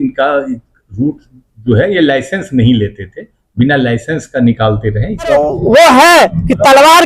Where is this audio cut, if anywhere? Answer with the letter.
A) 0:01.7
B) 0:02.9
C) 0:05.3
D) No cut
C